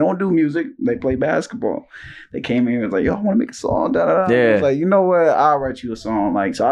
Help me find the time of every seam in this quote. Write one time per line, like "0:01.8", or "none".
none